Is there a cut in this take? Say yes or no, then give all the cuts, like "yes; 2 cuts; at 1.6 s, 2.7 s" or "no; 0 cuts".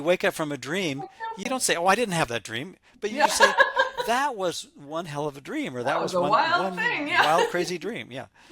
yes; 1 cut; at 1.4 s